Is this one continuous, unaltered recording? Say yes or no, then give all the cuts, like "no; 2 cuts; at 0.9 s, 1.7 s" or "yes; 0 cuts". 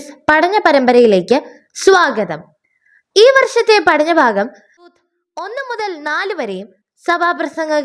no; 1 cut; at 4.9 s